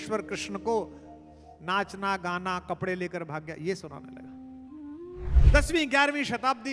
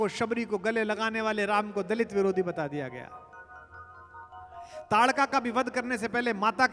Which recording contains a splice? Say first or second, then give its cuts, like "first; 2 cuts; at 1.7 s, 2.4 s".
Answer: first; 1 cut; at 5.4 s